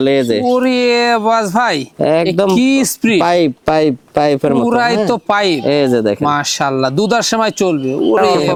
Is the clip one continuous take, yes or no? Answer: yes